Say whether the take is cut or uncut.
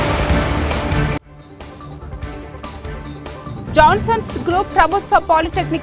cut